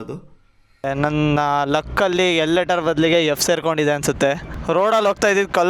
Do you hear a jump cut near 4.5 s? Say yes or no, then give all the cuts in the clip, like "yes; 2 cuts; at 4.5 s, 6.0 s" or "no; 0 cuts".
yes; 2 cuts; at 0.8 s, 4.5 s